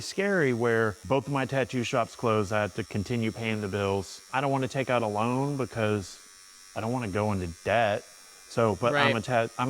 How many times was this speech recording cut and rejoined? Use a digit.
2